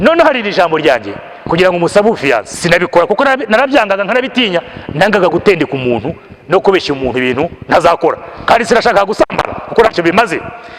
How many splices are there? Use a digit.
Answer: 1